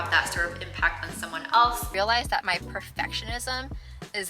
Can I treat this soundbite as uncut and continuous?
no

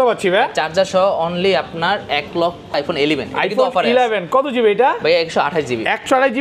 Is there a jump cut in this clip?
yes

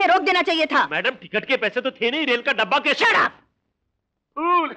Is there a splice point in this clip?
no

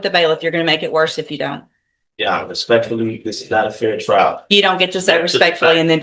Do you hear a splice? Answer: no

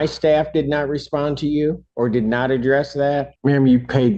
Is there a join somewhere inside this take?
yes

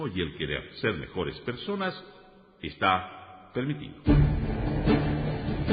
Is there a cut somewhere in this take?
yes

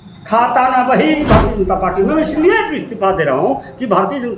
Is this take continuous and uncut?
no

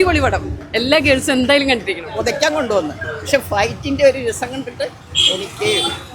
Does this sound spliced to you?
yes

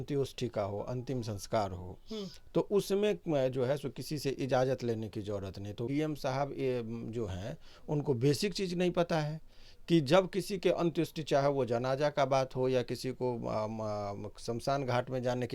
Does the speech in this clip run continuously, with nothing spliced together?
no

